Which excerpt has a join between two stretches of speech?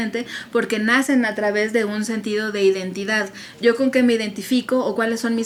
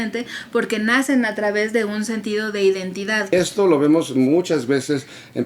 second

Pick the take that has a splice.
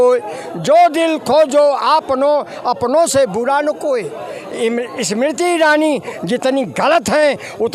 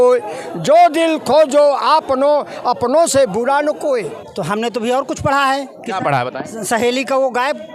second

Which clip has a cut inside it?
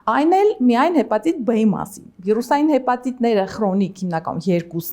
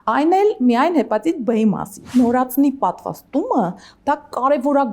second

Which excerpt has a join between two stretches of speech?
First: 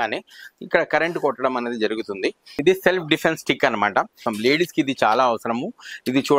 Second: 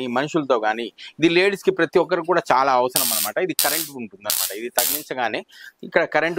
first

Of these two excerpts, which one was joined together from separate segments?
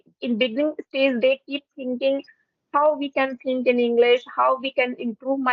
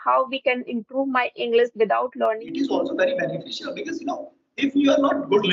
second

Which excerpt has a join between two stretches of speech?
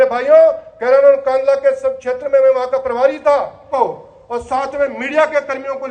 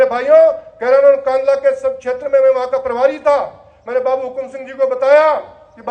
first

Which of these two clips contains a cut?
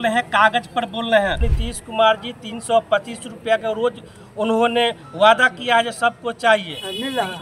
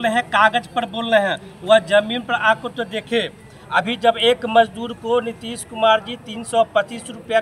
first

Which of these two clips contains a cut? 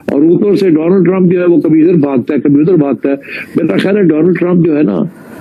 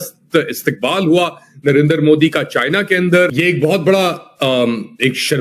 second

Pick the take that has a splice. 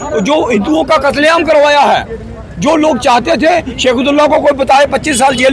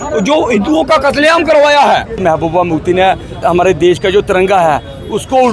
second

